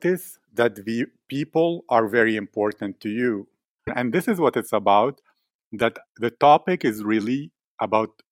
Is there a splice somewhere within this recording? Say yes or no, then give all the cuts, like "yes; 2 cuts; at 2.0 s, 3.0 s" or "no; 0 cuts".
yes; 1 cut; at 3.9 s